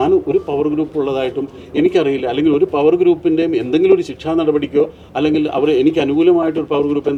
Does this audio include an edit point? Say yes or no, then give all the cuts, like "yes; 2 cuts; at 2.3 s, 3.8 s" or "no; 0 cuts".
no; 0 cuts